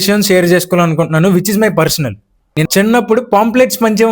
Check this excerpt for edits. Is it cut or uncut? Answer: cut